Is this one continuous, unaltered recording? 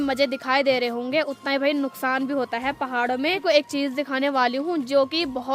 no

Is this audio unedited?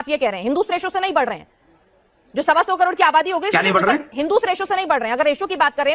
yes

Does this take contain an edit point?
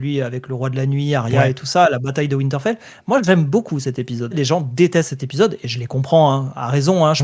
yes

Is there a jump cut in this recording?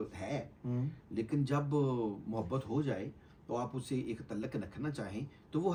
no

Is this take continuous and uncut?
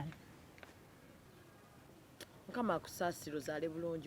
no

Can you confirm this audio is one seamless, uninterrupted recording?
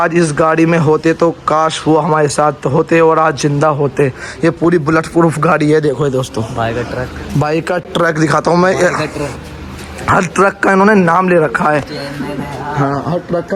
yes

